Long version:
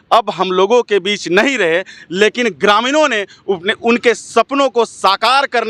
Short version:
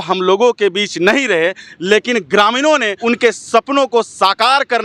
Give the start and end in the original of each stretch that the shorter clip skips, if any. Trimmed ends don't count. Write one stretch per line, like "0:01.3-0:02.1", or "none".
0:03.3-0:03.8